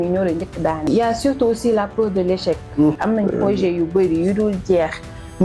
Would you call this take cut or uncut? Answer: cut